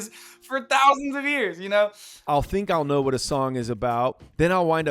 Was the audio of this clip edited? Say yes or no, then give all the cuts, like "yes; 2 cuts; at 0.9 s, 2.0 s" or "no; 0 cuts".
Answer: yes; 1 cut; at 2.1 s